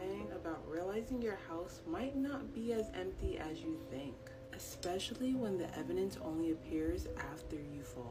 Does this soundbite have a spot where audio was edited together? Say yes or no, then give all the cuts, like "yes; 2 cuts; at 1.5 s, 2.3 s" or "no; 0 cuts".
no; 0 cuts